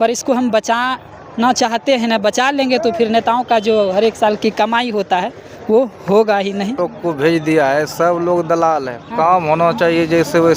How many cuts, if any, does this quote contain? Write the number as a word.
one